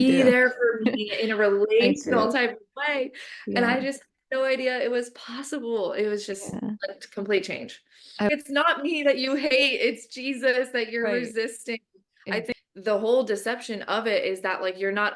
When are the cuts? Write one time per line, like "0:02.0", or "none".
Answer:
0:08.3
0:12.5